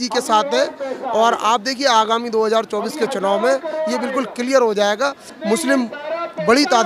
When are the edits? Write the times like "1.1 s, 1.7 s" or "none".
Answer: 5.3 s